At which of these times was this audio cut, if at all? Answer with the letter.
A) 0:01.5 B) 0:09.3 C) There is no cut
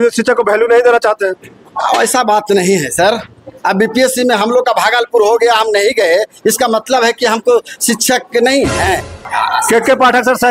B